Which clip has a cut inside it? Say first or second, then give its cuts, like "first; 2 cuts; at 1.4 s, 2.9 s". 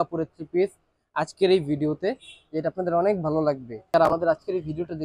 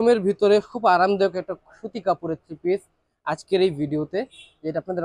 first; 1 cut; at 3.9 s